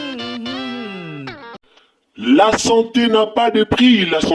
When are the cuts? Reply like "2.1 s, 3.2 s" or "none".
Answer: 1.5 s